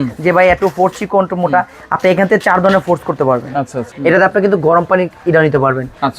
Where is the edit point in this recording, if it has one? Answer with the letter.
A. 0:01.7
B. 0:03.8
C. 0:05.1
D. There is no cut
B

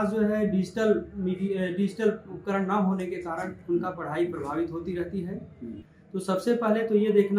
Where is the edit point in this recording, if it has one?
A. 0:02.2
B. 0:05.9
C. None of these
B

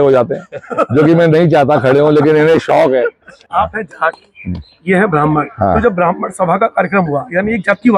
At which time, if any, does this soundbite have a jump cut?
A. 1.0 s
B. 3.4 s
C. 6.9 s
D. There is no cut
B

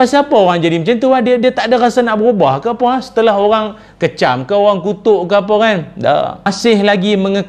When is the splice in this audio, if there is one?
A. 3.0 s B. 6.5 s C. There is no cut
B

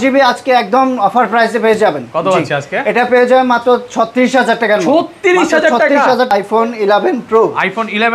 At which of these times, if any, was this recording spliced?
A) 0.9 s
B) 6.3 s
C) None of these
B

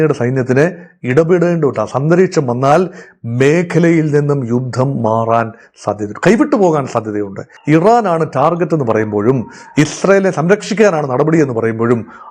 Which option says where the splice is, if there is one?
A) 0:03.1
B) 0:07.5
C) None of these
B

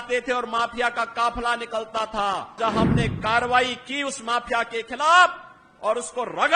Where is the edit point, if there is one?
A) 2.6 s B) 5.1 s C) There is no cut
A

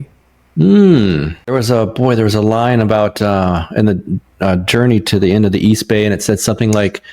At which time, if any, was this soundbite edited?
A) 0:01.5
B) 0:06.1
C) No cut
A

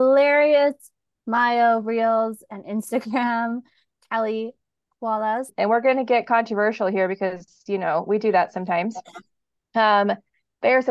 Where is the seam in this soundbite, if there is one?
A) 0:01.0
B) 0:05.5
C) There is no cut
B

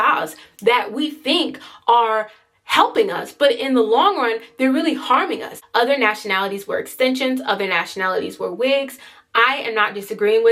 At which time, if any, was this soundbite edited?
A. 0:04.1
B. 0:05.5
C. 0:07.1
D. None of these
B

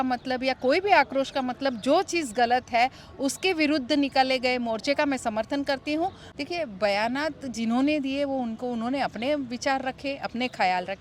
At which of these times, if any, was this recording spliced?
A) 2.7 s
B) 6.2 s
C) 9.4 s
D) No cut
B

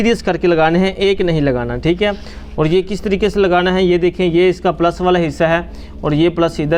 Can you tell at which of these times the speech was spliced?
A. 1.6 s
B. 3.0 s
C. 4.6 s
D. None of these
D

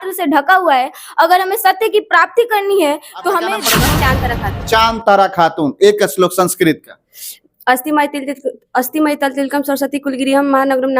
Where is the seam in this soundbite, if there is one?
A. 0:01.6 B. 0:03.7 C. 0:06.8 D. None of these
B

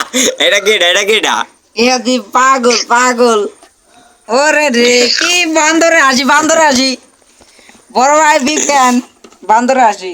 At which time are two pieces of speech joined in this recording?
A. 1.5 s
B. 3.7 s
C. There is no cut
C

